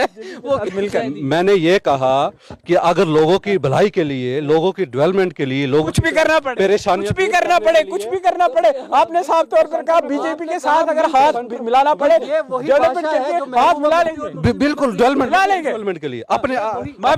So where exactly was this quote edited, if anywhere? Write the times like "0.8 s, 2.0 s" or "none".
none